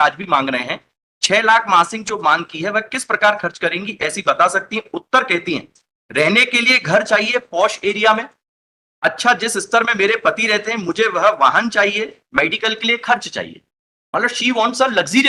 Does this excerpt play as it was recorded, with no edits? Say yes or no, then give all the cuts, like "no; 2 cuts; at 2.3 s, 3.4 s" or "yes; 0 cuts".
yes; 0 cuts